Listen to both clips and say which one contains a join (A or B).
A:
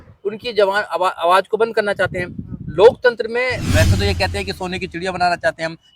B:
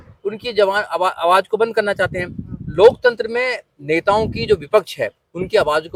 A